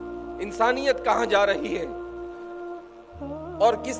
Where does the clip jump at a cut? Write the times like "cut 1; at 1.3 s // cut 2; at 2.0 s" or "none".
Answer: none